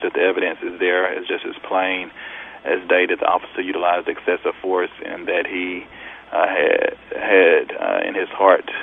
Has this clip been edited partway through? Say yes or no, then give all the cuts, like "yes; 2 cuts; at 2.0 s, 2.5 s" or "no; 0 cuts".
no; 0 cuts